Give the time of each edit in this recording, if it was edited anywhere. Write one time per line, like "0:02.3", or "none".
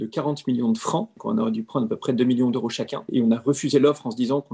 0:01.1
0:03.0